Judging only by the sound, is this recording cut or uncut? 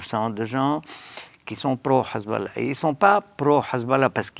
uncut